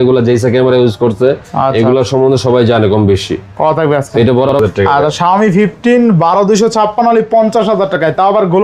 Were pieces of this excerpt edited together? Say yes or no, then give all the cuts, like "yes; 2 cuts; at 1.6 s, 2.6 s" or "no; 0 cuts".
yes; 1 cut; at 4.5 s